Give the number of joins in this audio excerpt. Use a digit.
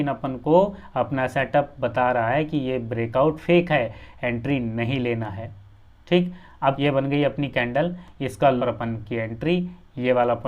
2